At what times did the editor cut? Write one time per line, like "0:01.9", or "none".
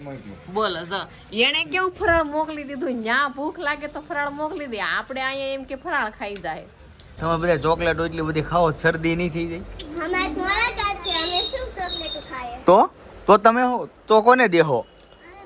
0:07.0